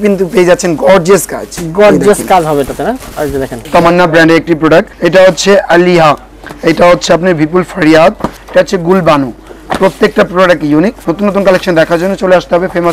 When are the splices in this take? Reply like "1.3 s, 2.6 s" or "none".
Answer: 3.6 s, 5.0 s, 8.3 s, 11.0 s